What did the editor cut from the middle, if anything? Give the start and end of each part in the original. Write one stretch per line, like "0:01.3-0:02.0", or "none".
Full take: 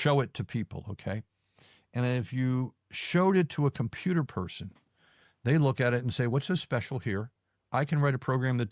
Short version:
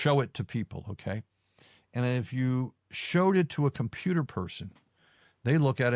none